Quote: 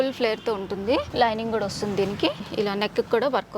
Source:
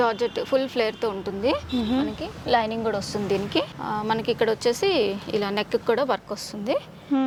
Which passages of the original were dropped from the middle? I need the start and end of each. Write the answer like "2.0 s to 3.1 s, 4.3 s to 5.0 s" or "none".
1.6 s to 2.4 s, 3.8 s to 5.2 s